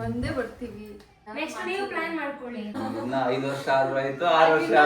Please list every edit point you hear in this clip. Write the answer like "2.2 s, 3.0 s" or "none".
1.1 s, 2.8 s